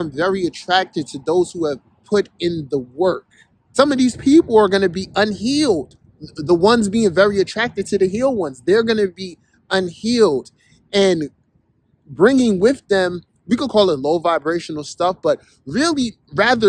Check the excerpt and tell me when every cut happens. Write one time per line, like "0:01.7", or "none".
0:03.6